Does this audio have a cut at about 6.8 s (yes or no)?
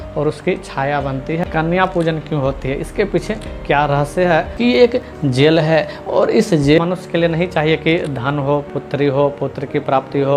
yes